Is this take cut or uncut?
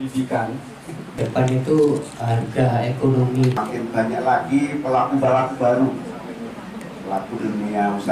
cut